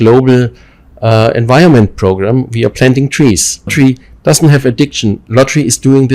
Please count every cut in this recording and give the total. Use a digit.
1